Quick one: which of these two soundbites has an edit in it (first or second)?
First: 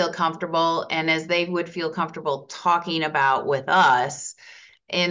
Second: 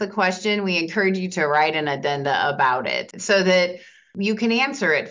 second